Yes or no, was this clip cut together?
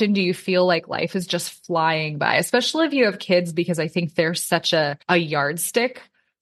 yes